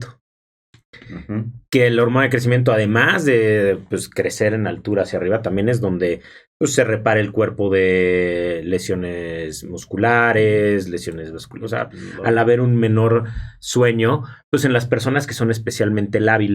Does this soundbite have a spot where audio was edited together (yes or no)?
yes